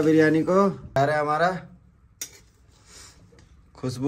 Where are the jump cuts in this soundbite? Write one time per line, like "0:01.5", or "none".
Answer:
0:01.0